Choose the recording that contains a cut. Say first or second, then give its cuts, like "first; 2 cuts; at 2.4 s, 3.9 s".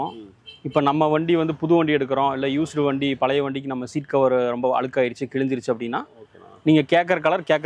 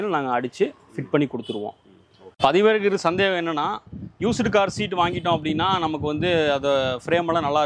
second; 1 cut; at 2.2 s